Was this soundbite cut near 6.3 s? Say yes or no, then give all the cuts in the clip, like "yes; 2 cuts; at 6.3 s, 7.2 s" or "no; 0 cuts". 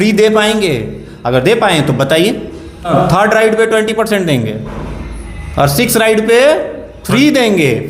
no; 1 cut; at 2.9 s